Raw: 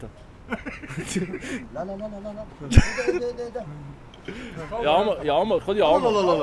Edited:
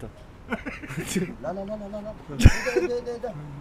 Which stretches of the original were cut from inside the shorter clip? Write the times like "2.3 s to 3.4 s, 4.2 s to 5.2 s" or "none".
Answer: 1.3 s to 1.6 s